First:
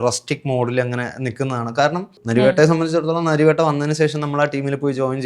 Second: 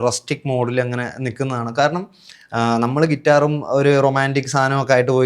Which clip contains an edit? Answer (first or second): first